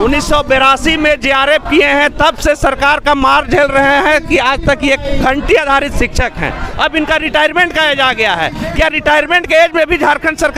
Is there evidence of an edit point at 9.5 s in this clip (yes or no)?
no